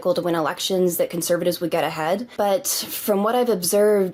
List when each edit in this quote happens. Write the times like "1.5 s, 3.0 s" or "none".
none